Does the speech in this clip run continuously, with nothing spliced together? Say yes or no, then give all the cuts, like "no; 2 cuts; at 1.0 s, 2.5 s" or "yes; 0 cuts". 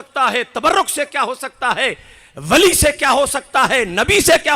yes; 0 cuts